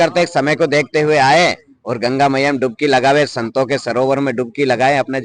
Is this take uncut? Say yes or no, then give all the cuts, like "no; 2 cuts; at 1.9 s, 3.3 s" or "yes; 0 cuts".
yes; 0 cuts